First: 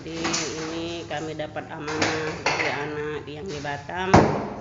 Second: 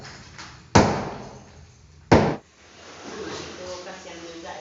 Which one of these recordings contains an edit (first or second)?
second